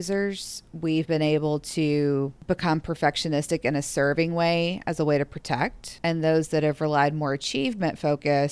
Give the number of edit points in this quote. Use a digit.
2